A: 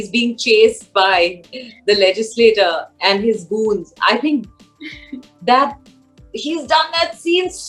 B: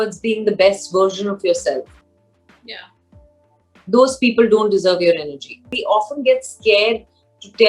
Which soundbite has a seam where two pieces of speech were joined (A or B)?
B